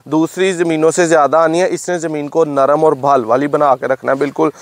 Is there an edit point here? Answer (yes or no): no